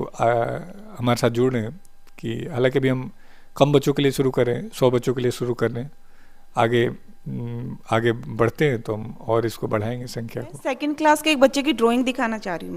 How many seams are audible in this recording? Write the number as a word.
one